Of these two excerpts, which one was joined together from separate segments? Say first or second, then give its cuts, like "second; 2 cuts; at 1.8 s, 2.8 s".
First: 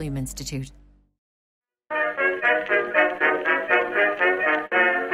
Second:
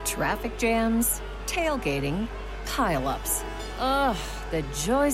first; 1 cut; at 1.4 s